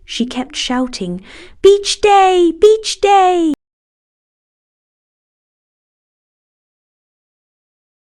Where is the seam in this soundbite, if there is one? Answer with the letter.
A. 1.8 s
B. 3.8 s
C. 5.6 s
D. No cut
D